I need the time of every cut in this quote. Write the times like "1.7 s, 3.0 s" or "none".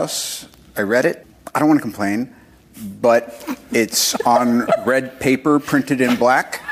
1.3 s